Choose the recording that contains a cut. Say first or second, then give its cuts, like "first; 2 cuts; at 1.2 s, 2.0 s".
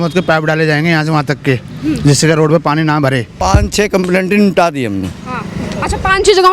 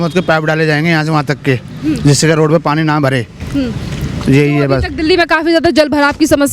first; 1 cut; at 3.3 s